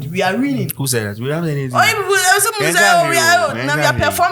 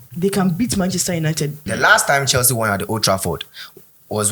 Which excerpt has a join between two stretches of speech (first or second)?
second